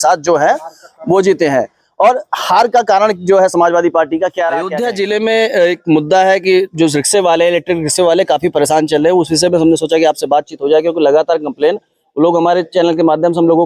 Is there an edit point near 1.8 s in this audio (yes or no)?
no